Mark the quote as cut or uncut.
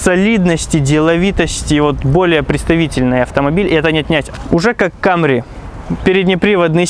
uncut